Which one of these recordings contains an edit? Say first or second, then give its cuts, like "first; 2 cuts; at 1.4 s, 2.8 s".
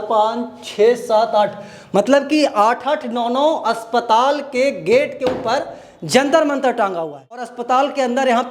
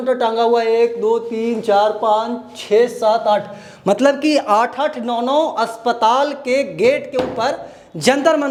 first; 1 cut; at 7.5 s